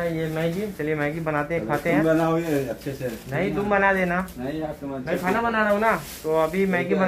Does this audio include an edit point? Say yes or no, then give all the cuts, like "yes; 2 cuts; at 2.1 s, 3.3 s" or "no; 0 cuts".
no; 0 cuts